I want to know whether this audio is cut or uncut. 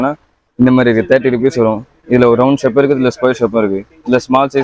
uncut